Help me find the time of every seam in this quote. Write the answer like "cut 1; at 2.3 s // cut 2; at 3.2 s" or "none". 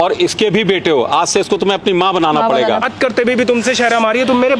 cut 1; at 2.9 s